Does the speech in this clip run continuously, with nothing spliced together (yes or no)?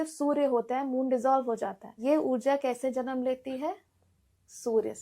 no